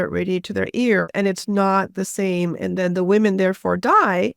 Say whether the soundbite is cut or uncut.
cut